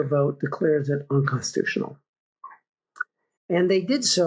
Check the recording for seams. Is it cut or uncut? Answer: uncut